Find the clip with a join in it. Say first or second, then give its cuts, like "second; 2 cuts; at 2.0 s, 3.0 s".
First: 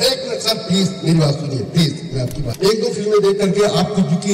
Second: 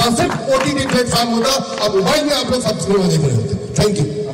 first; 1 cut; at 2.4 s